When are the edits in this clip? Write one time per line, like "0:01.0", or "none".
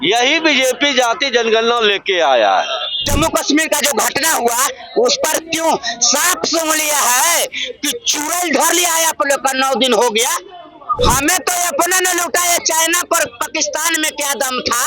0:03.0
0:10.8